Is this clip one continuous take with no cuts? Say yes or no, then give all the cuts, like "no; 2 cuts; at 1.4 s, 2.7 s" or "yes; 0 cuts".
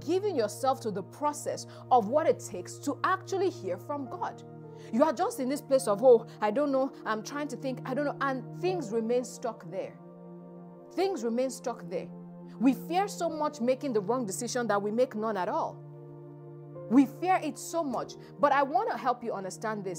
yes; 0 cuts